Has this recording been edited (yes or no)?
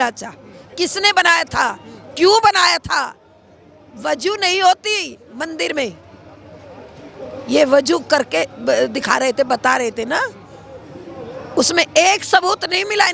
no